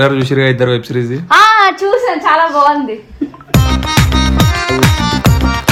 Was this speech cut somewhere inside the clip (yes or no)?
no